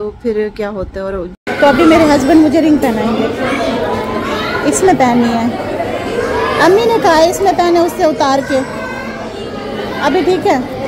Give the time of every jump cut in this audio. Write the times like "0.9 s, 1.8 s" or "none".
1.3 s